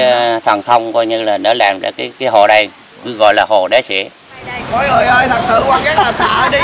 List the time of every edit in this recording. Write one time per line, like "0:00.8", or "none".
0:04.6